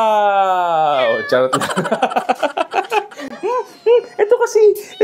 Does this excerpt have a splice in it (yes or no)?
no